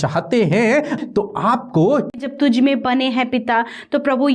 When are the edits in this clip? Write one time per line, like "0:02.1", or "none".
0:01.0
0:02.2